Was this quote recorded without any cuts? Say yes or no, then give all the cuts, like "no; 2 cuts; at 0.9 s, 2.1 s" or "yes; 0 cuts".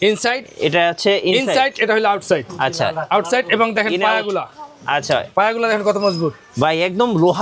yes; 0 cuts